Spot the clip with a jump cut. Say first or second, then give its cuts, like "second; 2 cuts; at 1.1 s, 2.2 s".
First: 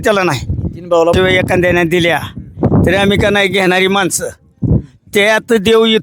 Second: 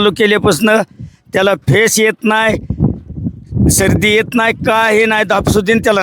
first; 1 cut; at 1.1 s